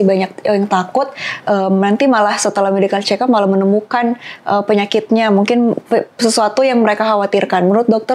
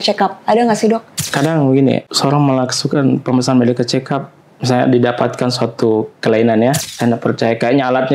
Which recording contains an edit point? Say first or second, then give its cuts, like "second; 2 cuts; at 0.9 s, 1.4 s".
second; 3 cuts; at 1.2 s, 2.1 s, 6.8 s